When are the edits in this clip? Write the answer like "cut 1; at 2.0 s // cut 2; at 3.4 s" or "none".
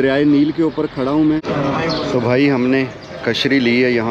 cut 1; at 1.8 s